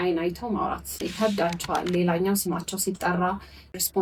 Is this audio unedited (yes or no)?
yes